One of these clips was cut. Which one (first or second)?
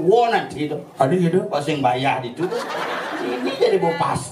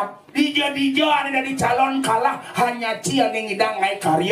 first